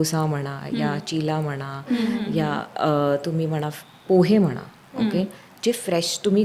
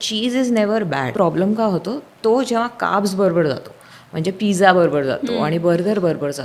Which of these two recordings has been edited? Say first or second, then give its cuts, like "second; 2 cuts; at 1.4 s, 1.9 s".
second; 1 cut; at 1.1 s